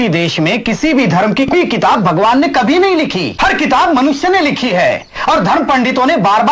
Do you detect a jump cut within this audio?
yes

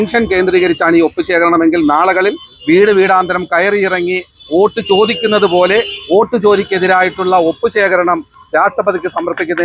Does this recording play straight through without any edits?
yes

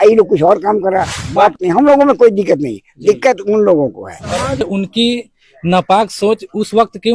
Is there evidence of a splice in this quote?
yes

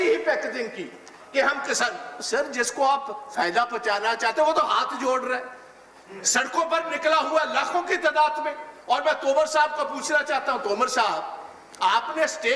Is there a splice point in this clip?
no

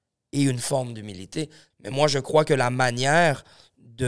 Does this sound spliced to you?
yes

